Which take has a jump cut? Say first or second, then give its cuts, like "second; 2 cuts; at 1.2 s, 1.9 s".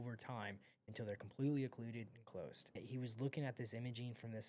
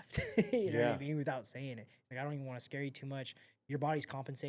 first; 1 cut; at 2.8 s